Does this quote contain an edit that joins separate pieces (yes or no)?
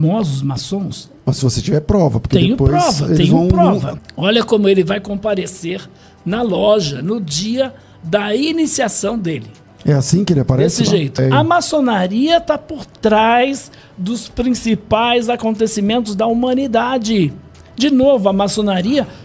yes